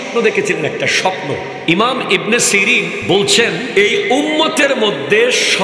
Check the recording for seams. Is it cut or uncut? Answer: cut